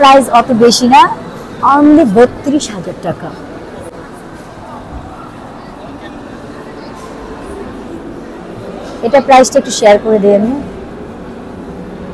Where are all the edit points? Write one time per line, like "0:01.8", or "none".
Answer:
none